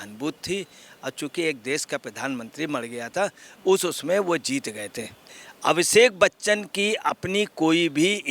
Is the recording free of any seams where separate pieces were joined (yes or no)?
no